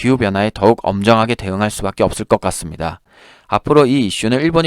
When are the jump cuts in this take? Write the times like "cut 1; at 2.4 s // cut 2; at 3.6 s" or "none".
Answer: cut 1; at 3.0 s